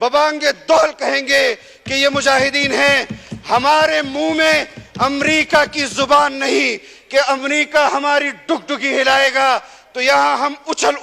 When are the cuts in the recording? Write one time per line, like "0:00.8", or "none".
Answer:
none